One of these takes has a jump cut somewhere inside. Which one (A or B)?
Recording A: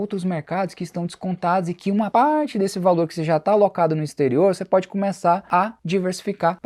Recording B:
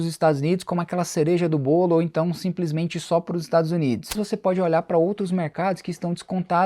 B